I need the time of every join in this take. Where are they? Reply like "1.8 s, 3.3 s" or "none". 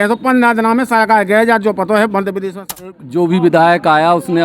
3.0 s